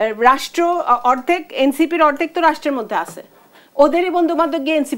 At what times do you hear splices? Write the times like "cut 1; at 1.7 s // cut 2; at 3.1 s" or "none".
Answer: none